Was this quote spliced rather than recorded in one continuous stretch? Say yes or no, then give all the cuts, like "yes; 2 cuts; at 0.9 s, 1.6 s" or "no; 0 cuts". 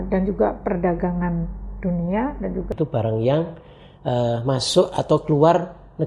yes; 1 cut; at 2.7 s